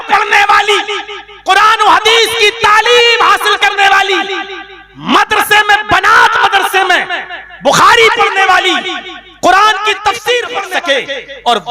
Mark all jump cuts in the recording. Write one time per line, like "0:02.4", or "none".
0:10.6